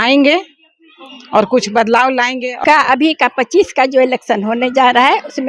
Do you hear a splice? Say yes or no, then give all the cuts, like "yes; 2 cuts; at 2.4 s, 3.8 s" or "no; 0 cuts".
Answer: yes; 1 cut; at 2.5 s